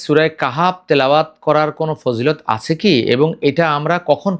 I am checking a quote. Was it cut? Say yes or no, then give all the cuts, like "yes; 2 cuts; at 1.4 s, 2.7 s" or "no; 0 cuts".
no; 0 cuts